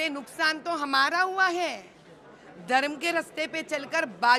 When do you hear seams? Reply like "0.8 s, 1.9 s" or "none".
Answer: none